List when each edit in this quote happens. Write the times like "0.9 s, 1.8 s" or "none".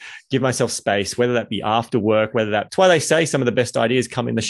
2.7 s